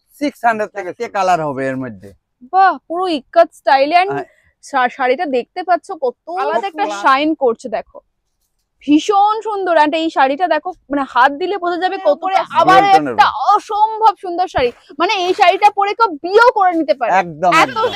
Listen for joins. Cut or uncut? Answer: cut